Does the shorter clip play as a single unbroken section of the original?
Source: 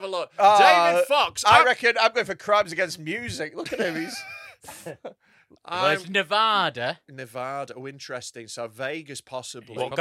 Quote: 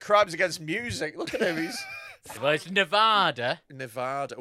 no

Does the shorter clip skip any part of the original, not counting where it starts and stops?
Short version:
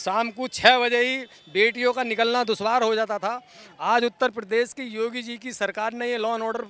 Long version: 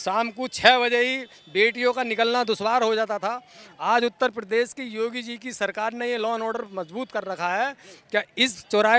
no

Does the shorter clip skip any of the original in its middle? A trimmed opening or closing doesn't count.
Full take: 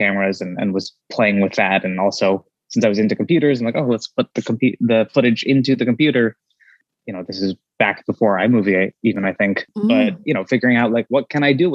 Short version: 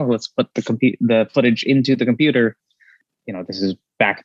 no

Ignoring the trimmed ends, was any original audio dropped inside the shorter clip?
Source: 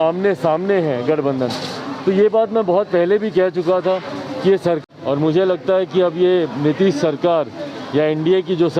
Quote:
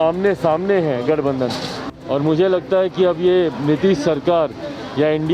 yes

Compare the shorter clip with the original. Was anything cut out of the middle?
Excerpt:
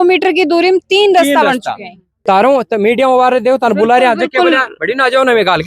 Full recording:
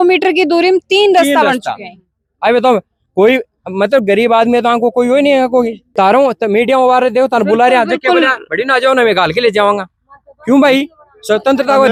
yes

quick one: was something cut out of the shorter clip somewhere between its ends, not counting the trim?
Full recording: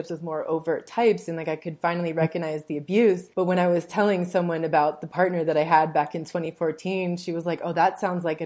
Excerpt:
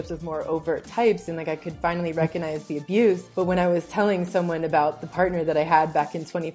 no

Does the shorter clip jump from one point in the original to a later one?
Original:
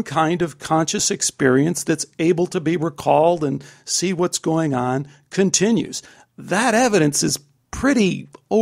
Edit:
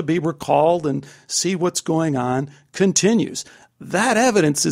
no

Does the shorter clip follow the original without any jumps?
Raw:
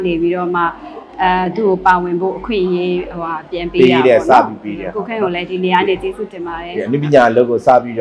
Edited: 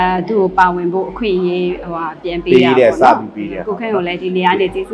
yes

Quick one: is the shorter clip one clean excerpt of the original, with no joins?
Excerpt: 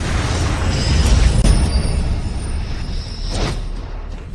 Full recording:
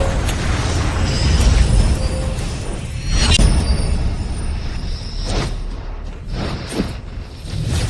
no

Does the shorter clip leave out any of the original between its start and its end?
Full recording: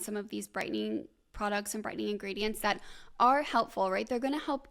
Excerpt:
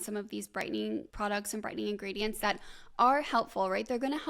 yes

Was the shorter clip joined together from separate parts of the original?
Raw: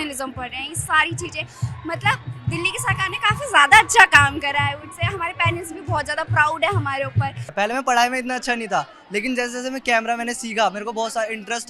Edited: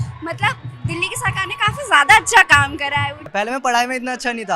yes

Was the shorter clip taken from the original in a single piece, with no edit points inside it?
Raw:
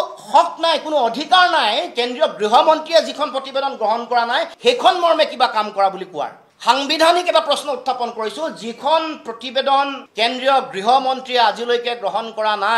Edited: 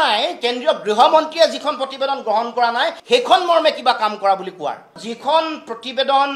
no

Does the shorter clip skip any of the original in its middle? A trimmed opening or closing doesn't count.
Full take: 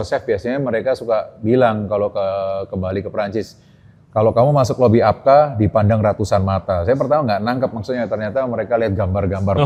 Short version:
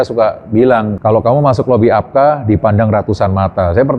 yes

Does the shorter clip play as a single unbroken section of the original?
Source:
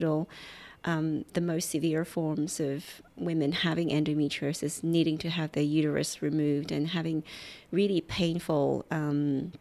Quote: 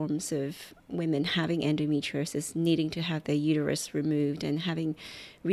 yes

